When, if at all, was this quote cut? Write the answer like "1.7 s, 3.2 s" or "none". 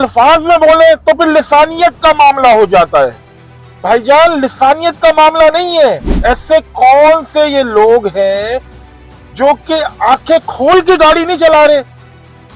6.1 s